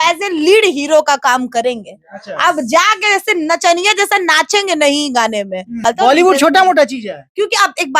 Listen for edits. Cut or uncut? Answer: cut